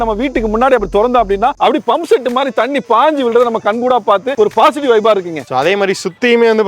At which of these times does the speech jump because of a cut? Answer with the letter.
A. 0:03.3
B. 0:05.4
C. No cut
B